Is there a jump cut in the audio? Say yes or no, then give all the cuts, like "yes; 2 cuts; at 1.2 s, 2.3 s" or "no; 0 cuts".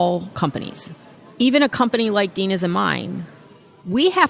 yes; 1 cut; at 1.2 s